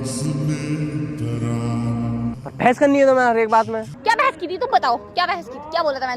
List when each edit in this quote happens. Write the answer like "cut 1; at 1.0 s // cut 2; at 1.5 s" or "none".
cut 1; at 2.4 s // cut 2; at 3.9 s